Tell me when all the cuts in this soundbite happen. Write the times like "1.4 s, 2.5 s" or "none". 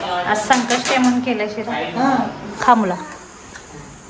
2.5 s

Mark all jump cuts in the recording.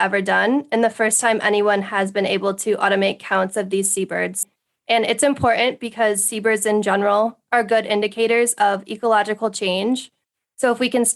4.4 s

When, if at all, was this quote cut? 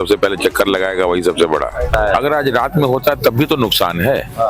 1.9 s

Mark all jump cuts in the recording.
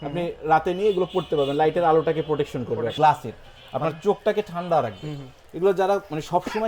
2.9 s

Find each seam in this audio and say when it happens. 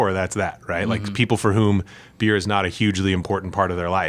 none

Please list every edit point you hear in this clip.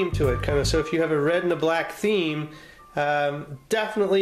none

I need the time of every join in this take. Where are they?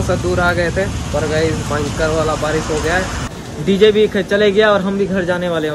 3.4 s

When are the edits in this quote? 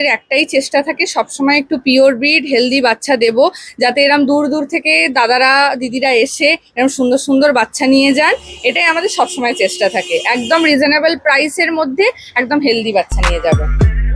none

